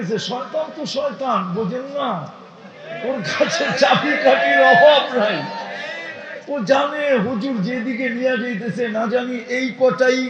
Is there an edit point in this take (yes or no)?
no